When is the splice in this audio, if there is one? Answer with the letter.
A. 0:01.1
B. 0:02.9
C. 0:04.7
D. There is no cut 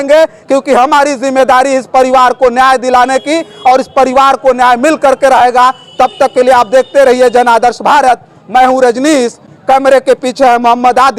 D